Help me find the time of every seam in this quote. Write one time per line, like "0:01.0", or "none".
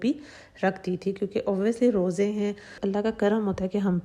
0:02.8